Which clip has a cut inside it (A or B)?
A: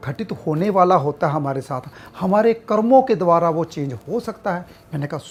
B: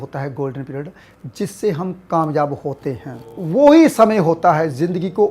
B